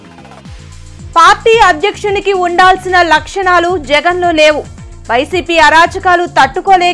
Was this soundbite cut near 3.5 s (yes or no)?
no